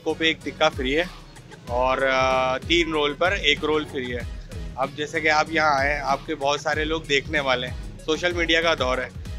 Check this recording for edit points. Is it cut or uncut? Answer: uncut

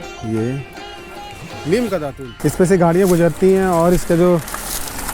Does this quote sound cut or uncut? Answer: cut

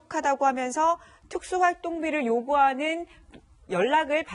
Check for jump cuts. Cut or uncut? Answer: uncut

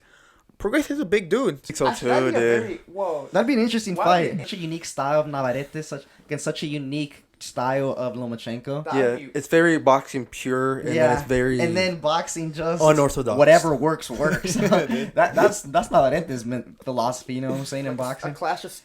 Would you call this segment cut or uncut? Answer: cut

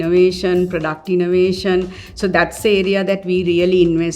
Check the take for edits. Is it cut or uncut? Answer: uncut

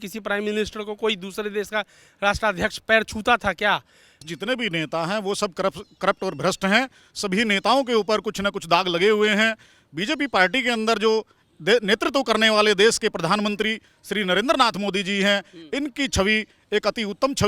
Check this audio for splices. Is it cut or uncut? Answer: cut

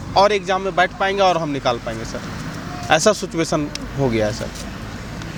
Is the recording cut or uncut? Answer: uncut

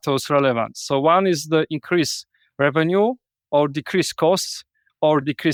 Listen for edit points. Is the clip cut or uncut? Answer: uncut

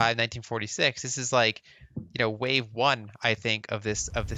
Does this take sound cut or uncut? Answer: uncut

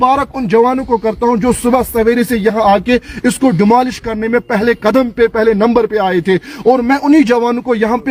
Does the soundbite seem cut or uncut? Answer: uncut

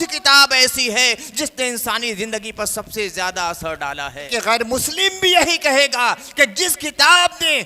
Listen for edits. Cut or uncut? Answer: cut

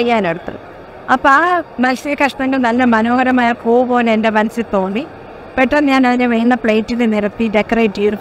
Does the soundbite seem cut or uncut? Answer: uncut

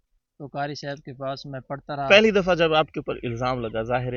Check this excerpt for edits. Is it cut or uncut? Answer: cut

